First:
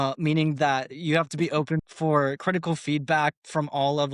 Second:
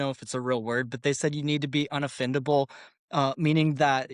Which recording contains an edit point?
first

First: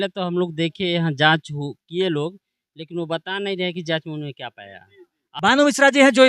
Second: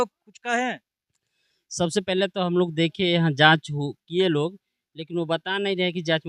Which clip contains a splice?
first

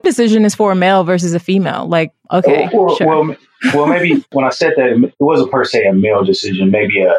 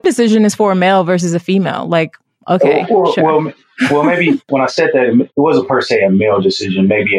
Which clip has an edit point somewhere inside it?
first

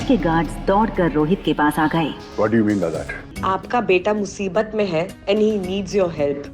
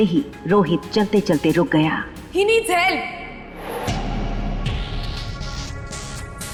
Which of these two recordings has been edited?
first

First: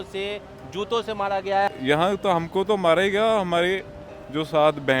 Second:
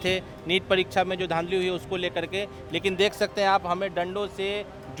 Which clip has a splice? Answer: first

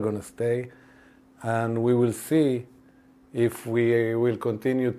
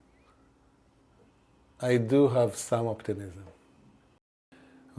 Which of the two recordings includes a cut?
second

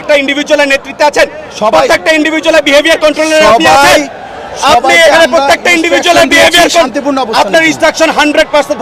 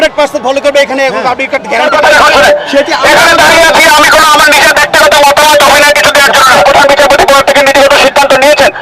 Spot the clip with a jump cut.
second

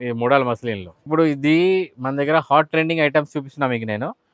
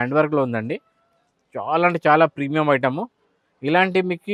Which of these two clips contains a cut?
first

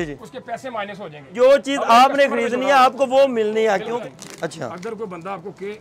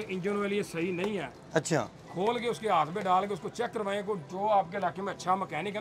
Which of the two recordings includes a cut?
first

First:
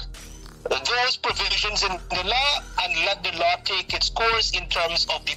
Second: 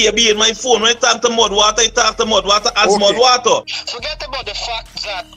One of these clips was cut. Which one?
second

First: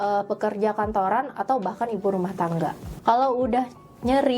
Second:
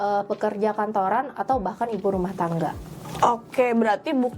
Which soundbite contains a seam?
first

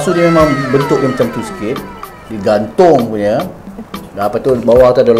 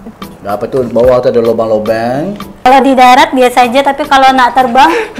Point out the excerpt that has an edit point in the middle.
second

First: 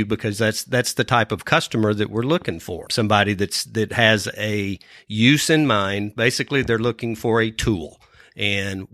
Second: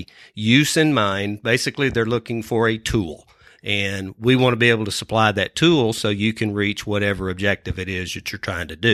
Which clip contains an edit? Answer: first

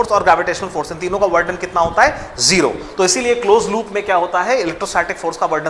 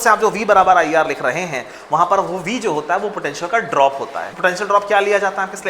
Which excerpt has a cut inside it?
second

